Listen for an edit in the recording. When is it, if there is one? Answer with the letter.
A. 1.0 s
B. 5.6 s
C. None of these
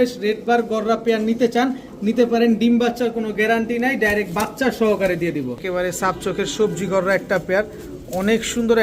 B